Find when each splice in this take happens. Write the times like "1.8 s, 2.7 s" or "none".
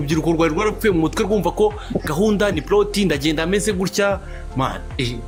none